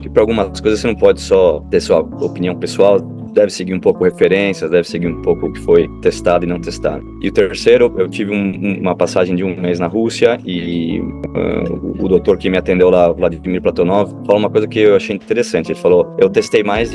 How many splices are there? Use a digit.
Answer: 6